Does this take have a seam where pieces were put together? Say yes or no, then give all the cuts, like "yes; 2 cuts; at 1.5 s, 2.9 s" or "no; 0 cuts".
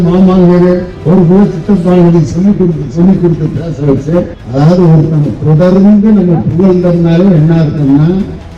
yes; 2 cuts; at 0.9 s, 4.4 s